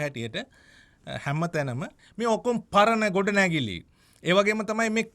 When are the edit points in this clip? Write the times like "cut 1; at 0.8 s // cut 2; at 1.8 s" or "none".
cut 1; at 2.0 s